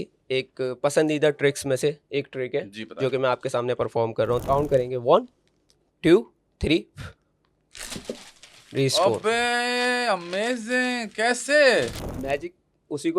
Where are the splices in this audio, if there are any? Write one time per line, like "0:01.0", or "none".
0:04.4
0:12.1